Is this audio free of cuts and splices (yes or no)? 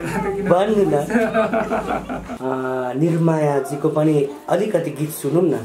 no